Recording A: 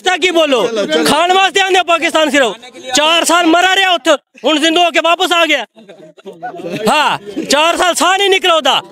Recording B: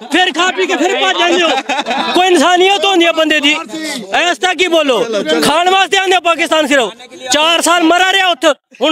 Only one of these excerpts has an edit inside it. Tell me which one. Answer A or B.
B